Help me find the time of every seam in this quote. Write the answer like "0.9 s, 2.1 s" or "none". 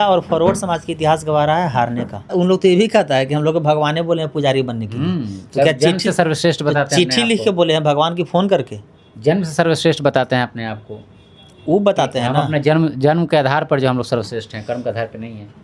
2.3 s